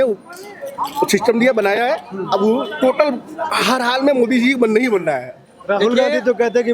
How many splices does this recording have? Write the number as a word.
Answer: zero